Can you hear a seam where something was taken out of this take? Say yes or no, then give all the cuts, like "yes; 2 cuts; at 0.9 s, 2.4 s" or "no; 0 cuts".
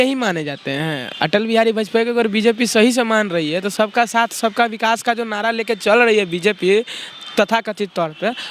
no; 0 cuts